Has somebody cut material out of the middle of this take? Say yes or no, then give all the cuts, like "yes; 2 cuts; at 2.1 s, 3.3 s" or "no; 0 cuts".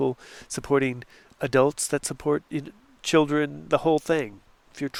no; 0 cuts